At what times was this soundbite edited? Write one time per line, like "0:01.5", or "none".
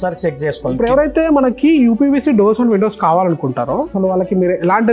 0:00.8
0:03.9